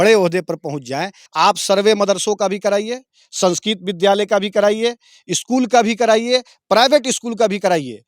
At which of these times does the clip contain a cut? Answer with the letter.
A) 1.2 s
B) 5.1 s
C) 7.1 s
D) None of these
A